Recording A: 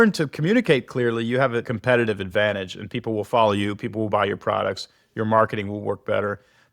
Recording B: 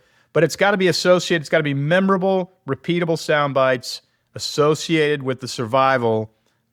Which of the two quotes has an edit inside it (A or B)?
A